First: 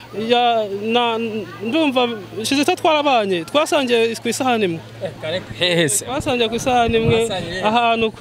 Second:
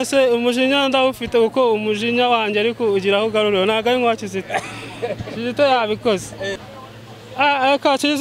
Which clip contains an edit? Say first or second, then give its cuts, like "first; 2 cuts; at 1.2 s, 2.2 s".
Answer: second; 1 cut; at 6.5 s